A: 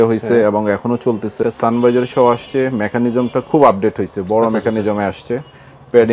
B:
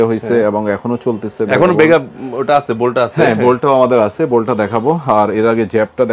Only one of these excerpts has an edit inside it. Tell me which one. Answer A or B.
A